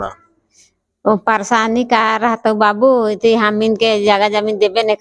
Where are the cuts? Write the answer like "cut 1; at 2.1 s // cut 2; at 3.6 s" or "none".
none